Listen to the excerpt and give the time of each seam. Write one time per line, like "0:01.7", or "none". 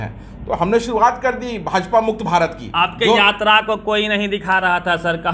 0:02.6